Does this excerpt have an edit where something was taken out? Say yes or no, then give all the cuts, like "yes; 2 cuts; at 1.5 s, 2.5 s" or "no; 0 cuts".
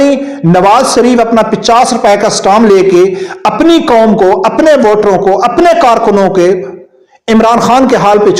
no; 0 cuts